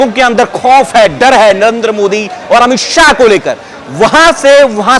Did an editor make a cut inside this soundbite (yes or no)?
no